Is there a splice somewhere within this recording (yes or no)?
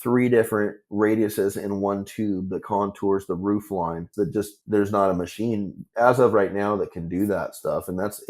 yes